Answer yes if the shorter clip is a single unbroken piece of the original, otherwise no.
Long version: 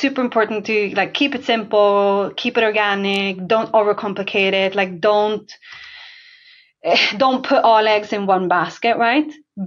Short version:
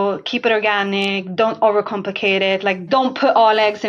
no